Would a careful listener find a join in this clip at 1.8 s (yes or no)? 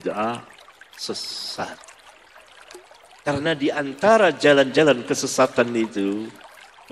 yes